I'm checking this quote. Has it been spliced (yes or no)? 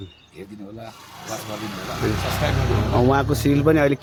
no